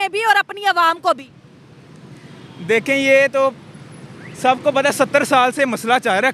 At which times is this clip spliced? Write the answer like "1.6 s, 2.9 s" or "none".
none